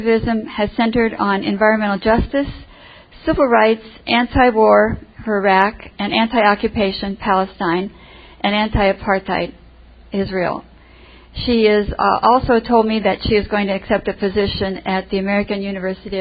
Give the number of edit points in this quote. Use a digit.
0